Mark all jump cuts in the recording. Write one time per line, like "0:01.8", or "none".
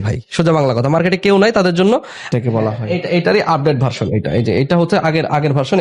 0:02.3